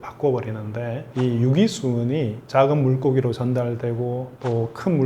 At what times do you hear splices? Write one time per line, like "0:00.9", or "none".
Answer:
none